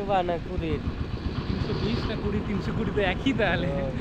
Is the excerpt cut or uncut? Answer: uncut